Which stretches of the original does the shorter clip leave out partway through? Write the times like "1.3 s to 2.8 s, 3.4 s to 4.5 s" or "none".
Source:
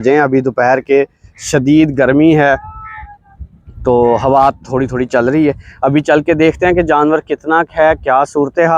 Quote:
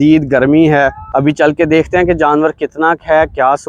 2.7 s to 5.7 s

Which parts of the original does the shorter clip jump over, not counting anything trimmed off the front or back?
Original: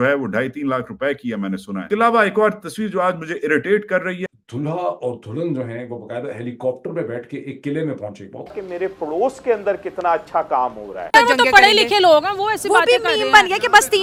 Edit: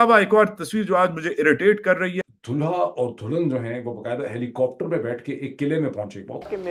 none

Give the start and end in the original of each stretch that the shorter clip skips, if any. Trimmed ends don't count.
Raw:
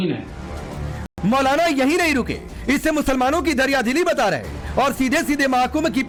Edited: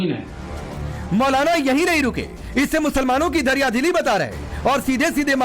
0.9 s to 1.0 s

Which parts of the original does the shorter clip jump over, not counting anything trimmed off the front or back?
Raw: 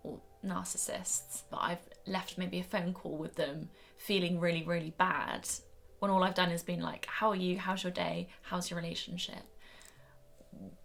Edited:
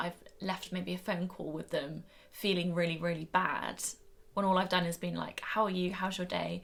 none

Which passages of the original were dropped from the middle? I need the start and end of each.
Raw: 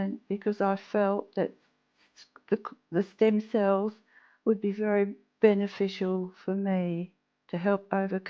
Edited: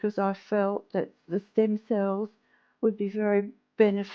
1.6 s to 2.8 s

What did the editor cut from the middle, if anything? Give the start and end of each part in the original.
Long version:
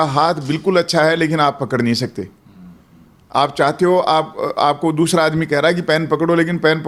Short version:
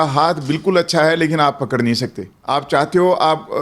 2.3 s to 3.2 s

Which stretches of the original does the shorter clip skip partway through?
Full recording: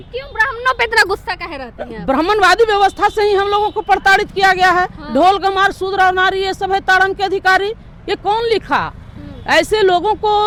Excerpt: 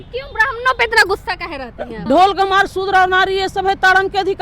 1.9 s to 5.0 s

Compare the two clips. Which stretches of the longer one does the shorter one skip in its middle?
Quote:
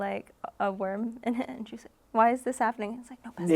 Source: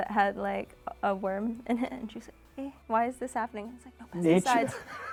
2.4 s to 2.8 s

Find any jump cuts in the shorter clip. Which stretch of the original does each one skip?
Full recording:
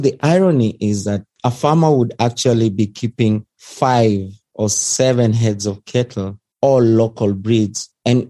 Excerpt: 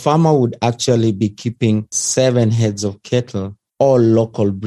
3.6 s to 4.8 s

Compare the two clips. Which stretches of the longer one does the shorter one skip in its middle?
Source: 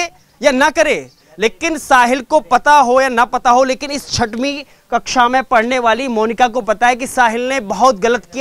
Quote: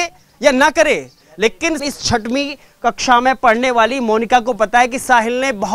1.8 s to 3.9 s

